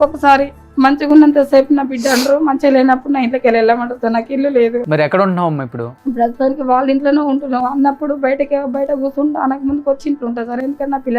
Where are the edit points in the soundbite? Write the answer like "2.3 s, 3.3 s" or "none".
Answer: 4.8 s, 5.8 s

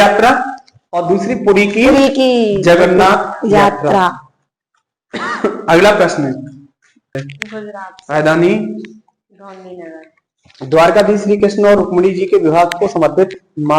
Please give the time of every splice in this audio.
7.1 s

